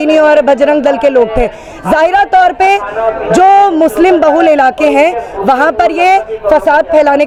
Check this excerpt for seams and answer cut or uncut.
uncut